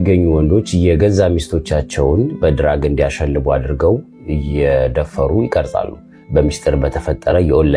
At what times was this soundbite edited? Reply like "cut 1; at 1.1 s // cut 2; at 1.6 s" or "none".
none